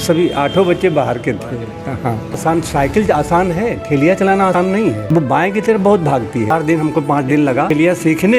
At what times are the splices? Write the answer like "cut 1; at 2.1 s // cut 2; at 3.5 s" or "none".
cut 1; at 2.4 s // cut 2; at 4.6 s // cut 3; at 6.5 s // cut 4; at 7.7 s